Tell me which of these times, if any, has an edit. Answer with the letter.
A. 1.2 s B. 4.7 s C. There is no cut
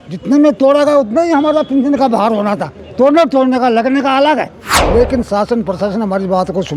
B